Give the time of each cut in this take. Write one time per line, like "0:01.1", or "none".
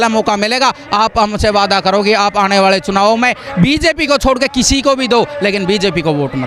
none